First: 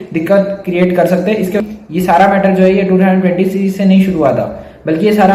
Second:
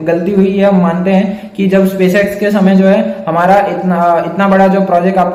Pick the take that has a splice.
first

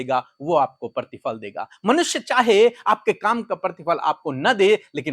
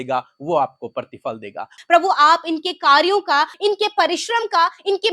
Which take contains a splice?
second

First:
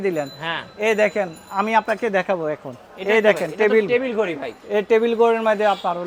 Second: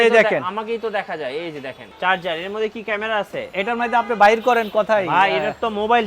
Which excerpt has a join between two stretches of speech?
second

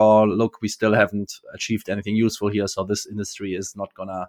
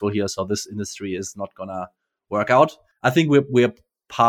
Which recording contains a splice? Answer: second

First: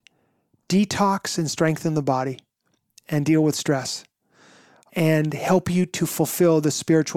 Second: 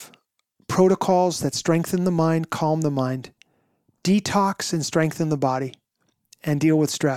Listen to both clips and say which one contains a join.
first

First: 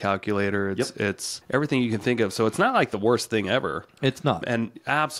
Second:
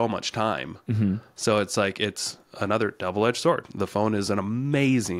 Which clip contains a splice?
first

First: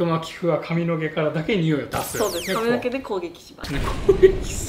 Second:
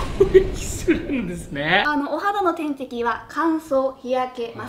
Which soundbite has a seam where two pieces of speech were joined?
second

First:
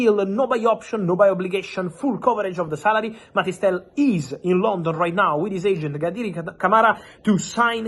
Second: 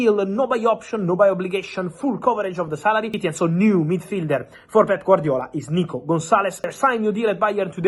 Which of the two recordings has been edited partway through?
second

